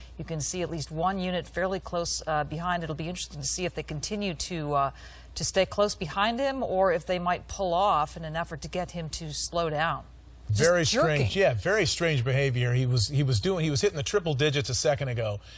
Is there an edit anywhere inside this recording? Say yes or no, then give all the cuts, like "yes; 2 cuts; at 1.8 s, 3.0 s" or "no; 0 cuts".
yes; 1 cut; at 13.3 s